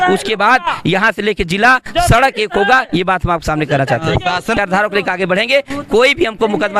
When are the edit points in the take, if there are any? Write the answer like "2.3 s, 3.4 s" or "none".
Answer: 4.6 s